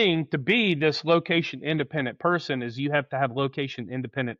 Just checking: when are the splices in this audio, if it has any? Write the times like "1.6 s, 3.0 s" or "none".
none